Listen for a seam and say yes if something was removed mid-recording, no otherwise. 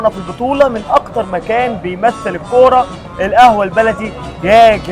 no